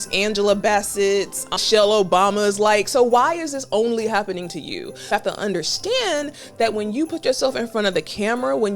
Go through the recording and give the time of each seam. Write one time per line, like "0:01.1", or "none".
0:01.6
0:05.1